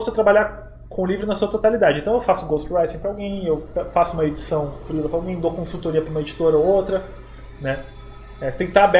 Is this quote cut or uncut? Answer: uncut